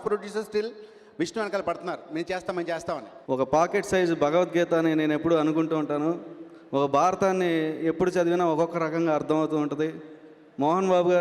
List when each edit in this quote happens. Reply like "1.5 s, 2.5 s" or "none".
3.1 s

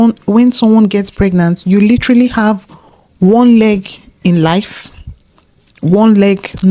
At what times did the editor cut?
none

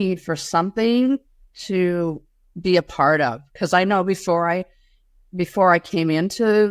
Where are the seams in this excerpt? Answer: none

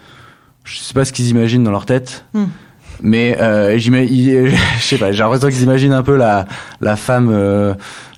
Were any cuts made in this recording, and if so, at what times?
none

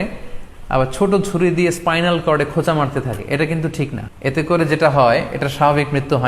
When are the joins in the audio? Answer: 4.0 s

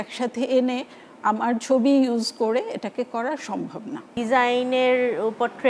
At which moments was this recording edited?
4.1 s

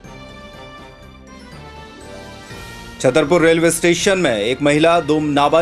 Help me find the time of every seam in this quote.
none

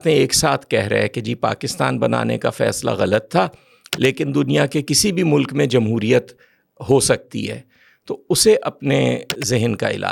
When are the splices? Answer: none

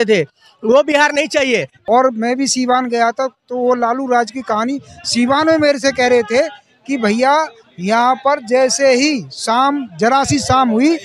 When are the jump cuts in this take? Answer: 1.7 s

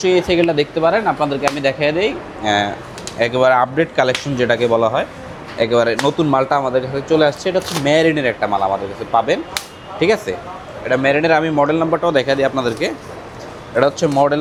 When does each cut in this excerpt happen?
none

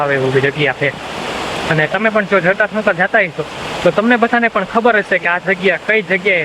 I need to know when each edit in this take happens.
none

